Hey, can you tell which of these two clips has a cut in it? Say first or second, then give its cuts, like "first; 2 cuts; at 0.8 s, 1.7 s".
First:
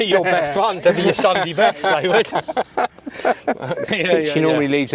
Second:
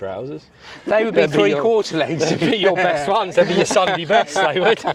first; 1 cut; at 3.9 s